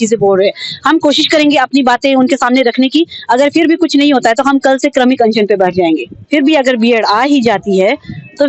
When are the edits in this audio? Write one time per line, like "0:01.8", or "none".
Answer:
0:06.2